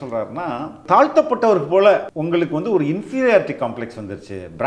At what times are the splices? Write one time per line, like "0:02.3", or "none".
0:00.8
0:02.1